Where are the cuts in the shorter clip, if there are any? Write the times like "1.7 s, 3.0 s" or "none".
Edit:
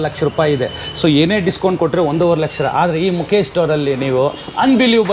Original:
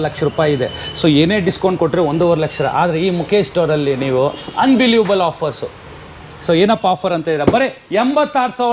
none